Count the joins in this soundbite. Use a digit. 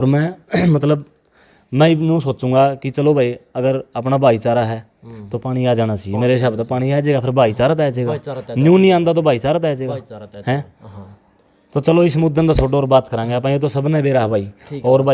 0